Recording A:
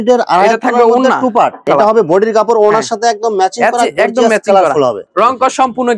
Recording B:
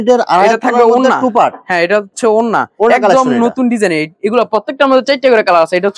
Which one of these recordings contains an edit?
A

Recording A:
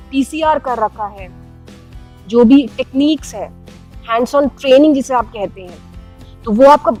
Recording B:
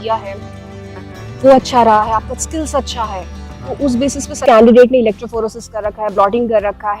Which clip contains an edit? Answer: B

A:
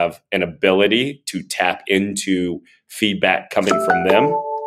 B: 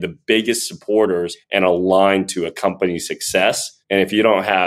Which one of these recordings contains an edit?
B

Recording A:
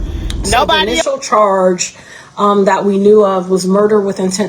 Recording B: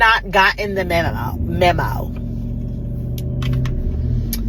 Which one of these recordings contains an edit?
A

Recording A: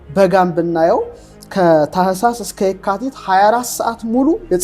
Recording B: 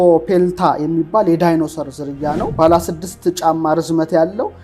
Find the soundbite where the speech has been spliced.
B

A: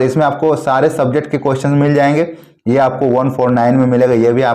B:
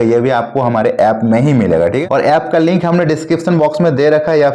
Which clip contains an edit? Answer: B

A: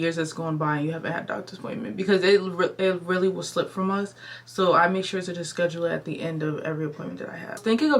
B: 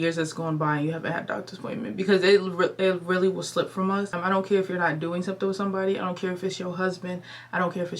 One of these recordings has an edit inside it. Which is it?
B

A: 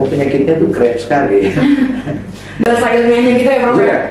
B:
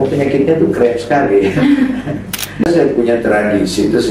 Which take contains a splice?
B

